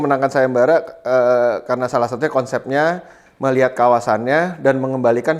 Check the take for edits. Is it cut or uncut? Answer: uncut